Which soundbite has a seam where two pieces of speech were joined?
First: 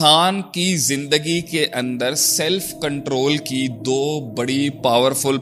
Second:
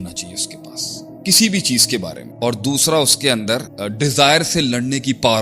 second; 2 cuts; at 2.2 s, 3.8 s

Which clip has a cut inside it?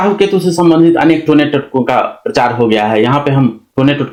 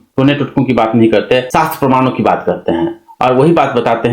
second; 1 cut; at 1.5 s

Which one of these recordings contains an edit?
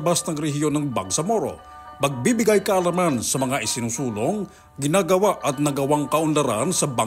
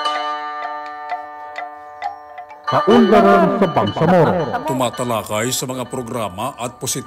second; 1 cut; at 2.7 s

